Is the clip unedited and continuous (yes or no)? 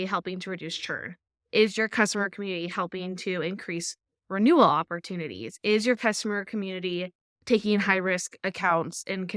yes